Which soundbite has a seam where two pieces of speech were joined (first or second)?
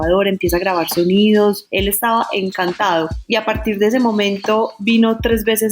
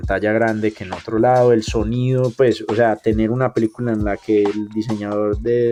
first